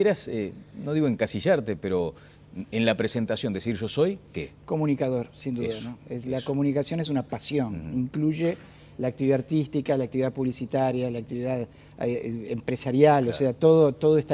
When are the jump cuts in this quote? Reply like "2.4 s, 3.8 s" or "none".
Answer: 5.7 s